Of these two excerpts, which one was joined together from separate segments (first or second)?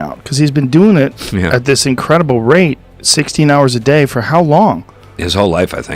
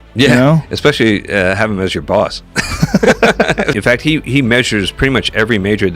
second